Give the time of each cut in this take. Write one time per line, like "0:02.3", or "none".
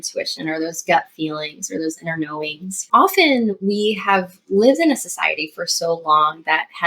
0:02.7

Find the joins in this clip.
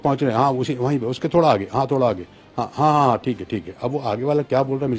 none

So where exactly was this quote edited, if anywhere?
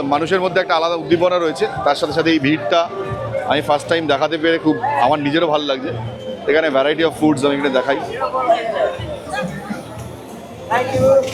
none

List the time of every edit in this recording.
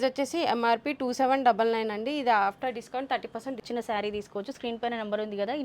0:03.6

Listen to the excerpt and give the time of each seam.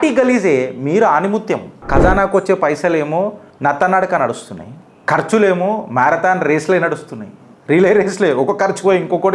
0:01.9

